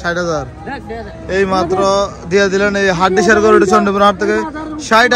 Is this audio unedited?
yes; 0 cuts

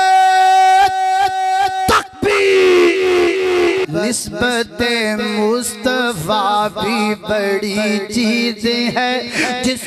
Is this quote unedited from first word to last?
no; 1 cut; at 3.8 s

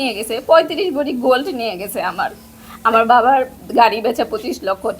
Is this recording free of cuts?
yes; 0 cuts

